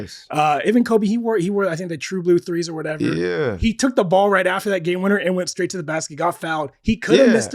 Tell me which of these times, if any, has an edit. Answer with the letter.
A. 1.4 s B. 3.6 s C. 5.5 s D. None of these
B